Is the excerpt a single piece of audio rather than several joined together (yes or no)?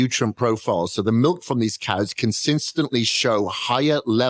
yes